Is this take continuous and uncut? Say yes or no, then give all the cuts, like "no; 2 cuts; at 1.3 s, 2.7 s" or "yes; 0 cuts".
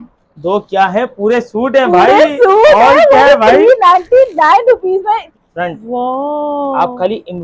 no; 1 cut; at 5.3 s